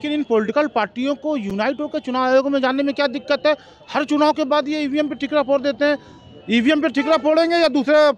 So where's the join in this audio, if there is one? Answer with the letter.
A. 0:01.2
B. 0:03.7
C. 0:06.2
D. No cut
D